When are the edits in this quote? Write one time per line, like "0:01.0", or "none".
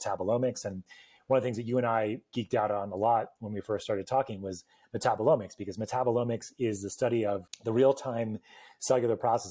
0:07.5